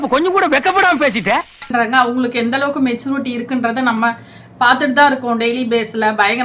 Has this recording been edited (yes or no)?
yes